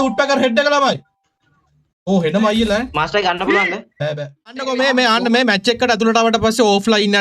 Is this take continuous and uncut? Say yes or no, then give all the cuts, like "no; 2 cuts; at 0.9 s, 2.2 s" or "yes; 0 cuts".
no; 1 cut; at 4.5 s